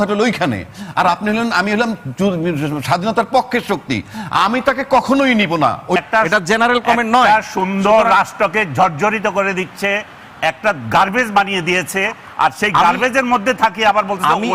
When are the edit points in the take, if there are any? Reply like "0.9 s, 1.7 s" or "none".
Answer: 6.0 s